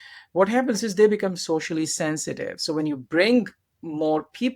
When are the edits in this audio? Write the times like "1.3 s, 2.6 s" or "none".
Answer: none